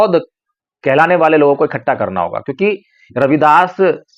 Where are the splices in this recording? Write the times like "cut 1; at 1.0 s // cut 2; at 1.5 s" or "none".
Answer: none